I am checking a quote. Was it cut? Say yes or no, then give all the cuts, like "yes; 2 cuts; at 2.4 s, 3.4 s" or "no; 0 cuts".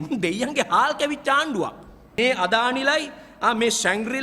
yes; 1 cut; at 2.1 s